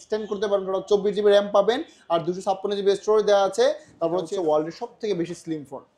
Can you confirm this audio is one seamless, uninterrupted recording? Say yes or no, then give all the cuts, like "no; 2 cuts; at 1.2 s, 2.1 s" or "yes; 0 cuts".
no; 1 cut; at 4.2 s